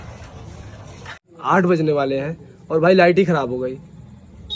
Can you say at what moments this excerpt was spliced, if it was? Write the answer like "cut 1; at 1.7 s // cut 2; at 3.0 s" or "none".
cut 1; at 1.3 s